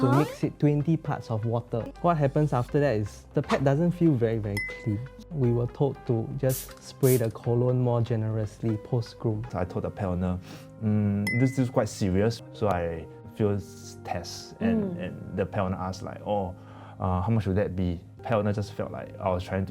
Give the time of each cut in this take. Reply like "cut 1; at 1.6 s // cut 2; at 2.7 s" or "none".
cut 1; at 1.9 s // cut 2; at 9.5 s // cut 3; at 12.4 s // cut 4; at 18.2 s